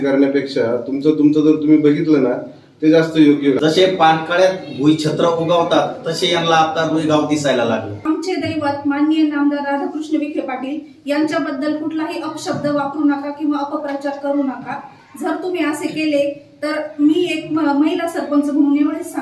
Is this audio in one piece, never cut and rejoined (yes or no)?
no